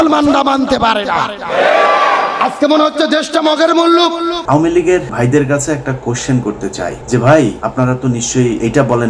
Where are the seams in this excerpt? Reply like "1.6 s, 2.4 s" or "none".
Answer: 4.4 s, 5.1 s, 7.0 s, 7.6 s